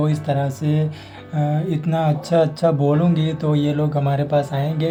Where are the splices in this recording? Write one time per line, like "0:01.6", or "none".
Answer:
none